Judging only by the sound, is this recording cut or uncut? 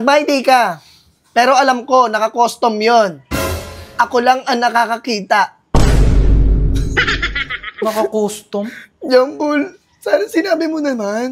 uncut